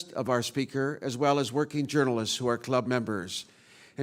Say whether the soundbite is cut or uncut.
uncut